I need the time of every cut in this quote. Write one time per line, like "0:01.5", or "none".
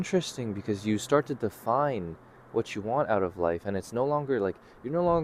none